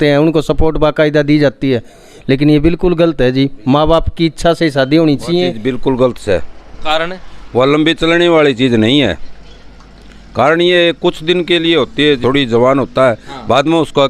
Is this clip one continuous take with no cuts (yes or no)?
no